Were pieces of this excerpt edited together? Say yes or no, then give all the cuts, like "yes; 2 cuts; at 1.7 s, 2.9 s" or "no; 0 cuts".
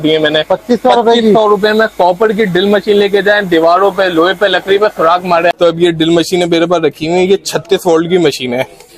yes; 1 cut; at 5.5 s